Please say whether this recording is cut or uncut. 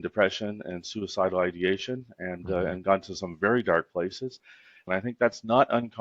cut